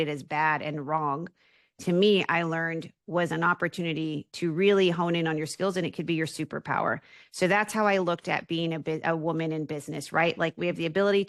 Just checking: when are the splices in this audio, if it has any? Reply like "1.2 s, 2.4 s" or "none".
none